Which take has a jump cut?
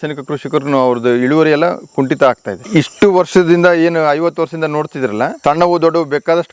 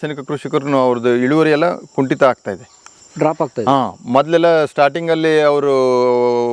first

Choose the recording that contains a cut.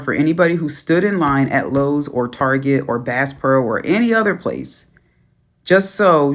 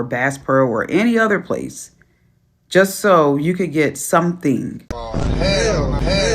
second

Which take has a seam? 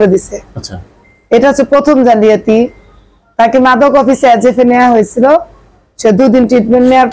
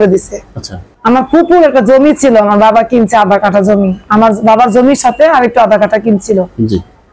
second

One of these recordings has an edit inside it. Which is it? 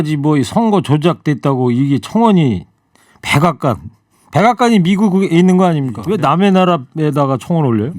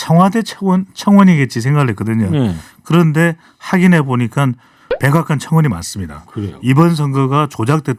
first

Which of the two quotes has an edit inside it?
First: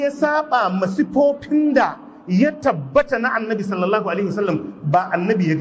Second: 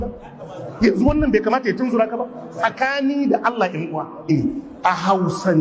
second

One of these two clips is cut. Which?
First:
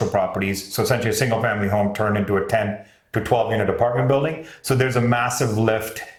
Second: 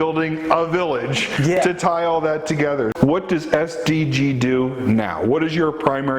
second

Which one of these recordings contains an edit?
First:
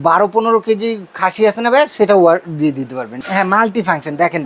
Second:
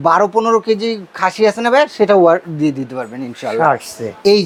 first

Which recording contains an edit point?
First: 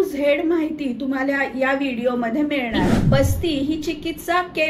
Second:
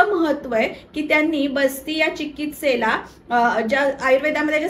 first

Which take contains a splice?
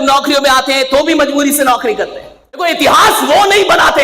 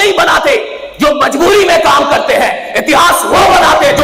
first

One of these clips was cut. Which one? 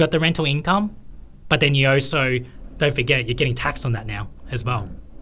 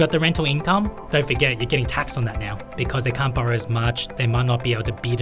second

